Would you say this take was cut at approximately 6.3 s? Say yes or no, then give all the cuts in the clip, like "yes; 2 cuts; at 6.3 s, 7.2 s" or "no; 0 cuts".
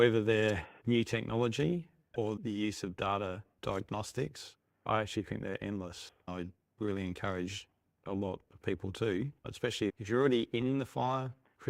yes; 1 cut; at 6.3 s